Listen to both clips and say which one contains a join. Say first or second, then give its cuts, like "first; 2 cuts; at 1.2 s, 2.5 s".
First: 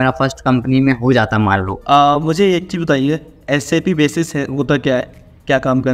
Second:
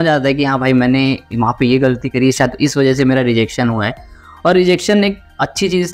first; 1 cut; at 1.8 s